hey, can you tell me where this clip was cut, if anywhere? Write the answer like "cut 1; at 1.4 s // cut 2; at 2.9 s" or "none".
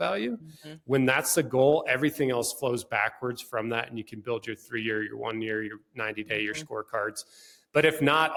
none